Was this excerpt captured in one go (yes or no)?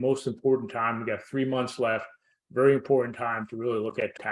yes